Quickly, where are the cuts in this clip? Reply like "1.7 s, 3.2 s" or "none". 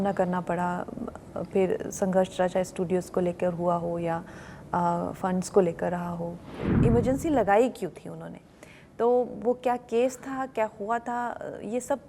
6.7 s